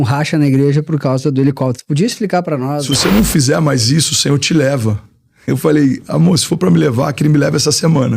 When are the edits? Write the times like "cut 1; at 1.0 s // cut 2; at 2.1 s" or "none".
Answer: cut 1; at 2.9 s